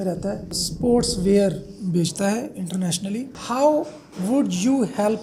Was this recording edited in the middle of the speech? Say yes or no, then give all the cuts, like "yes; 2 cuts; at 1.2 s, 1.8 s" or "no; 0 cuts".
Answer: no; 0 cuts